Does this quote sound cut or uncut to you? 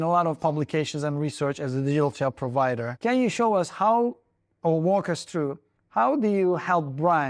cut